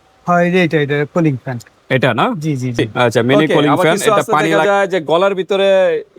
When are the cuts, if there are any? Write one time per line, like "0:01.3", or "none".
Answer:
0:04.6